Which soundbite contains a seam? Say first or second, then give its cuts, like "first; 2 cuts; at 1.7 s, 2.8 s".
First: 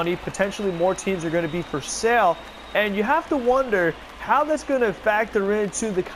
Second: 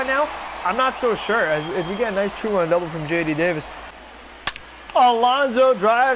second; 1 cut; at 3.8 s